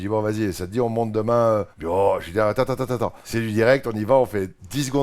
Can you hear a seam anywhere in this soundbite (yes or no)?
yes